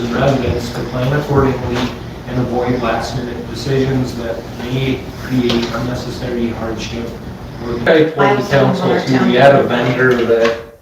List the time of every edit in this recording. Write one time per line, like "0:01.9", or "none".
0:07.9

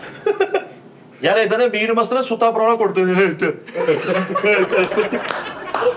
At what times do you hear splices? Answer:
0:01.0

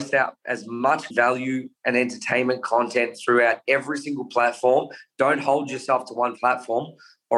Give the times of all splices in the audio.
0:01.1

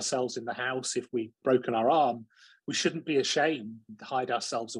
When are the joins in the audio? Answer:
0:01.4

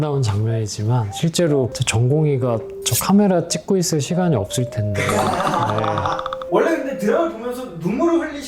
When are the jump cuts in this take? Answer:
none

